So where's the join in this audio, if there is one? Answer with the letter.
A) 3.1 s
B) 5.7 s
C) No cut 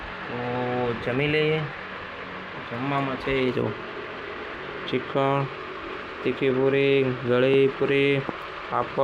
C